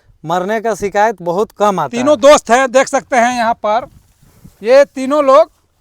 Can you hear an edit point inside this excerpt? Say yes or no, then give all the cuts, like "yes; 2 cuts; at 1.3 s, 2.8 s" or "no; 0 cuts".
yes; 1 cut; at 1.9 s